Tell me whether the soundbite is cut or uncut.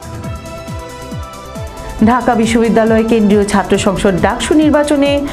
cut